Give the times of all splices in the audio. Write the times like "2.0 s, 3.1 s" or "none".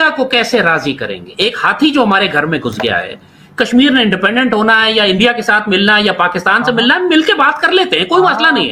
none